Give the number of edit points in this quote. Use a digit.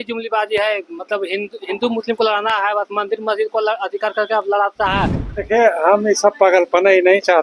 1